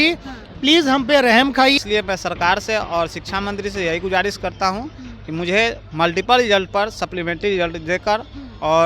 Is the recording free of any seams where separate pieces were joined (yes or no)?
no